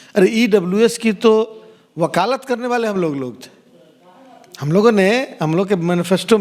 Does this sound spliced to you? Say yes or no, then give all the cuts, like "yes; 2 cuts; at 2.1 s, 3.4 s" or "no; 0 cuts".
no; 0 cuts